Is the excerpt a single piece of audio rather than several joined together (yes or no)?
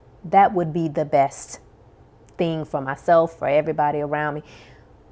yes